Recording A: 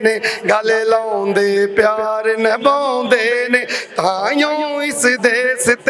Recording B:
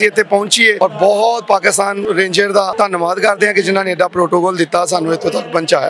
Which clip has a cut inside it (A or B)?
B